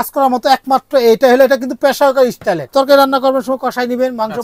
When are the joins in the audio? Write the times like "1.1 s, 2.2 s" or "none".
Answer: 2.7 s